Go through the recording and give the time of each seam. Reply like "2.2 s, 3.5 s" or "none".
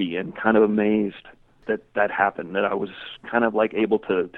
1.6 s